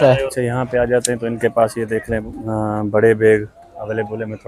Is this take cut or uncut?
uncut